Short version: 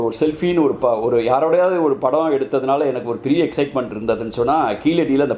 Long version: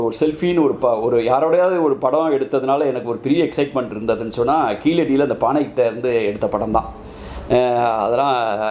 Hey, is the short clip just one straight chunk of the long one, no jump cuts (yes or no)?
yes